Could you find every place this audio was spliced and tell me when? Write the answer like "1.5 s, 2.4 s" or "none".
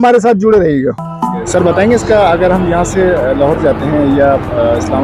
1.5 s